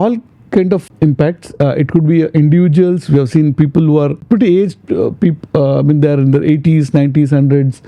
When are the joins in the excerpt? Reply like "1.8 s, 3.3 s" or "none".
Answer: 0.9 s, 4.2 s